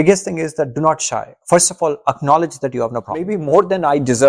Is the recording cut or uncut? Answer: cut